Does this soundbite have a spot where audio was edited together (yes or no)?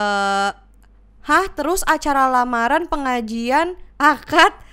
no